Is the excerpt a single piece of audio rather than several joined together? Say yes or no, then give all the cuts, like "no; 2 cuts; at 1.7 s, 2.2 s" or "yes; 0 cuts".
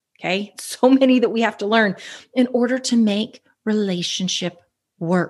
yes; 0 cuts